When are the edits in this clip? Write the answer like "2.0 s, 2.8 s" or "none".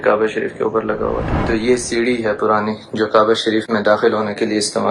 1.3 s